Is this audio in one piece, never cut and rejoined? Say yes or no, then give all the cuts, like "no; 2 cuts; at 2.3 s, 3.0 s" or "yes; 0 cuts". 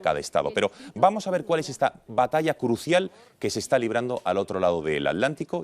no; 1 cut; at 2.1 s